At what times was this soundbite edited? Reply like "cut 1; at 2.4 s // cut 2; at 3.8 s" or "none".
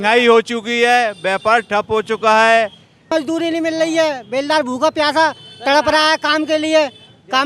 cut 1; at 3.1 s